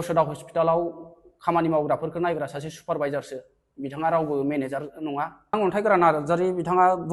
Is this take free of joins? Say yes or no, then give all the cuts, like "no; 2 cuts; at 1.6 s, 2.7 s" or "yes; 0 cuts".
no; 1 cut; at 5.5 s